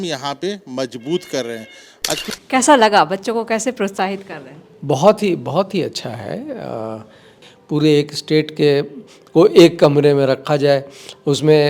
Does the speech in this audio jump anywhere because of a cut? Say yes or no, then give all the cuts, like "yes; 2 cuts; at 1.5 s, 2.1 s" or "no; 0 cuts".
yes; 2 cuts; at 2.3 s, 7.4 s